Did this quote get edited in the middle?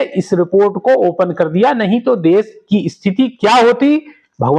no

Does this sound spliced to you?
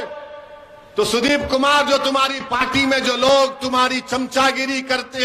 no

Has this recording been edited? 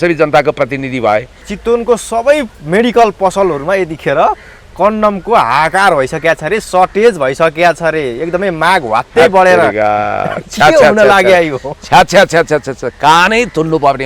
yes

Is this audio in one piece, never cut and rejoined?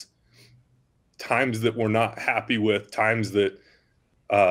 yes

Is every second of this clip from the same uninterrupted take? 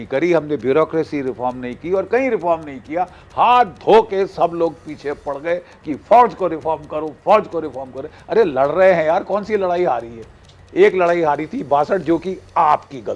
yes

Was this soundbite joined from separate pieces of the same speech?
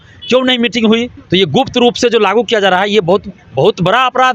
yes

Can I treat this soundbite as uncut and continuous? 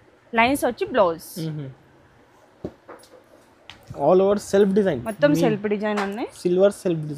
yes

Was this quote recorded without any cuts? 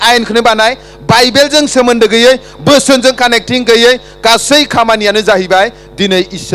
yes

